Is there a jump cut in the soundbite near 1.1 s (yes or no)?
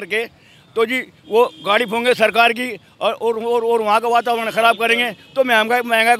no